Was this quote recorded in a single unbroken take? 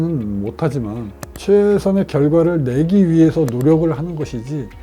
no; 1 cut; at 1.2 s

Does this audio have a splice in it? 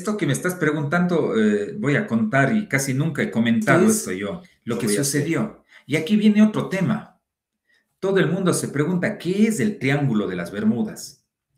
yes; 1 cut; at 5.0 s

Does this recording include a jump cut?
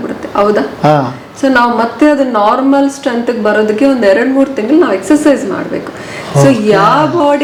no; 0 cuts

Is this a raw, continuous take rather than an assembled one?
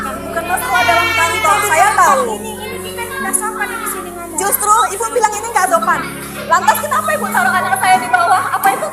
yes; 0 cuts

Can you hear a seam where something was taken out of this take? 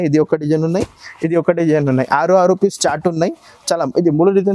no; 0 cuts

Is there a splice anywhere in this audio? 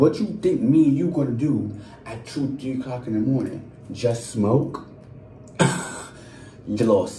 no; 0 cuts

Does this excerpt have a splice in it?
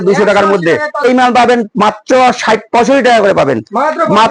yes; 1 cut; at 1.0 s

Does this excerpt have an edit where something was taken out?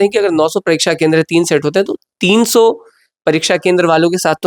no; 0 cuts

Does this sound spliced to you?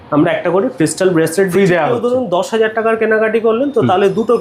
no; 0 cuts

